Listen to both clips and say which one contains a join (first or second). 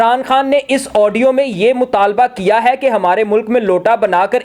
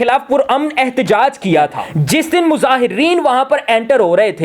second